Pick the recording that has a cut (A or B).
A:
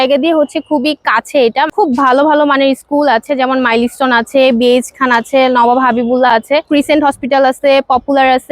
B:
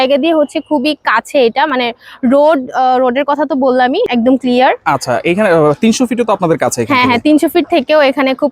A